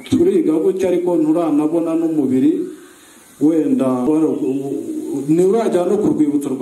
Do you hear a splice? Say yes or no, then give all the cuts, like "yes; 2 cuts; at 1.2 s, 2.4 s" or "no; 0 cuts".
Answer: yes; 1 cut; at 4.1 s